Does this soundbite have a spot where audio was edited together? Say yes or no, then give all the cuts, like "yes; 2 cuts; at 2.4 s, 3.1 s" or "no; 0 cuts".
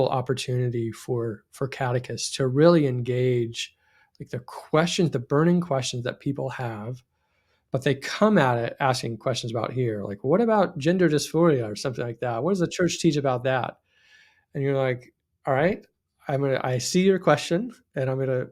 no; 0 cuts